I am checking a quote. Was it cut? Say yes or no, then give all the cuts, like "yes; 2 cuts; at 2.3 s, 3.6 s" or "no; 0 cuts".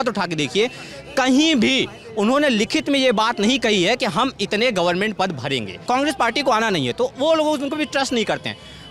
yes; 1 cut; at 5.8 s